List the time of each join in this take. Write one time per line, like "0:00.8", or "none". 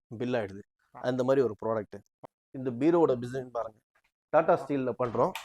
0:02.3

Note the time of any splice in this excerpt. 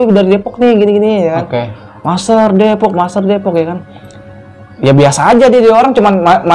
none

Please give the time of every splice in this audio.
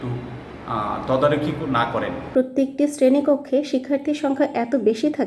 0:02.3

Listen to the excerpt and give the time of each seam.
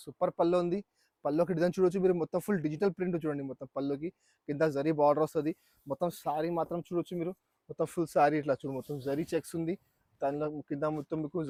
none

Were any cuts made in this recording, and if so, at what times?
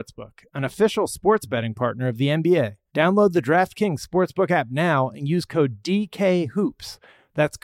0:02.8

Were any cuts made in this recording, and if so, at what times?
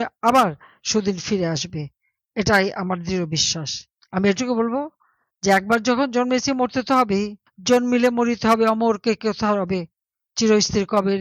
0:03.9

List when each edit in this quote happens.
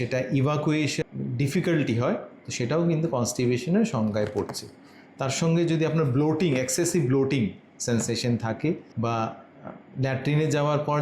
0:01.0

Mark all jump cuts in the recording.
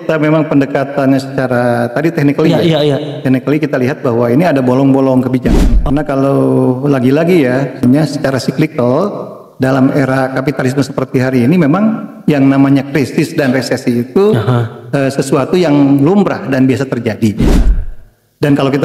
0:05.6
0:07.8

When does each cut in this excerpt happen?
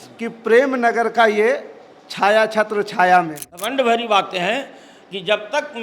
0:03.5

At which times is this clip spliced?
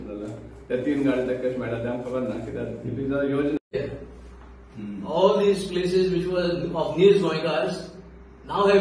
0:03.7

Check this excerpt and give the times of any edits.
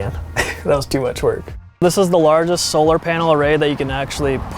0:01.7

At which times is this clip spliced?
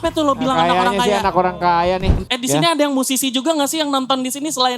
0:02.2

